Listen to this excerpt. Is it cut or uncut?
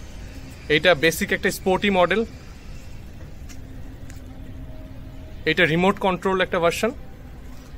uncut